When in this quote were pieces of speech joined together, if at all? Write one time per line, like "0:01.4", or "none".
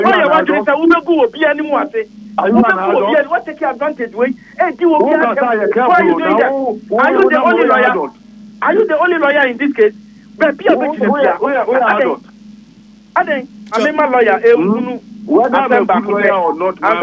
0:13.7